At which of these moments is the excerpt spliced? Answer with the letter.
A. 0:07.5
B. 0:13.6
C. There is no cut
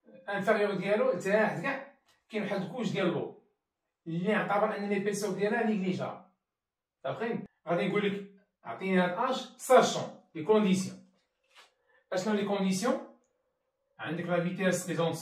A